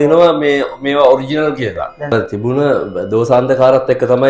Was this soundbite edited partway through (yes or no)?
yes